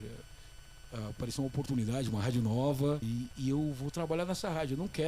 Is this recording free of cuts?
no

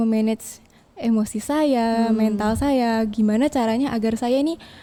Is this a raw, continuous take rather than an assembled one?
yes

